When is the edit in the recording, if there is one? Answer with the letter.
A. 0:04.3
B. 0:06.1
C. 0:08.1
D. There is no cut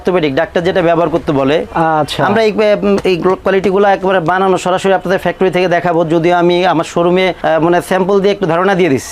D